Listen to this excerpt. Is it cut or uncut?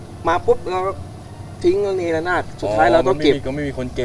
uncut